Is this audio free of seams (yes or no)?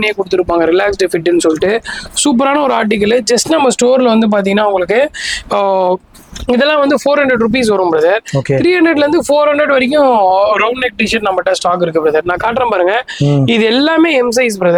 yes